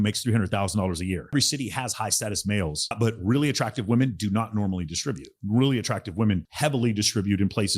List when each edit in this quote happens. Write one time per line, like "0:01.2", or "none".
0:01.3
0:02.9